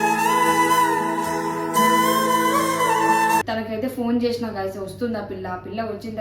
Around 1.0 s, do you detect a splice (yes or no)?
no